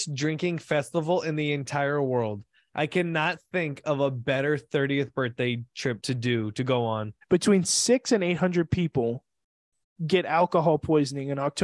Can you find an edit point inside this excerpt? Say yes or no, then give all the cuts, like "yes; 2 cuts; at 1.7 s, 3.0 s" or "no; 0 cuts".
yes; 2 cuts; at 6.0 s, 7.1 s